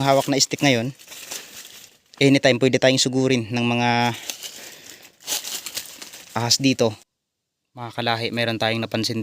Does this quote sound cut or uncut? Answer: cut